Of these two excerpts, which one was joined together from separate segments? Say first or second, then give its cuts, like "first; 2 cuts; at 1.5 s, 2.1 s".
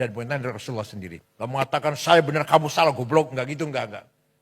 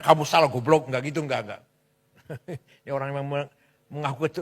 first; 1 cut; at 1.2 s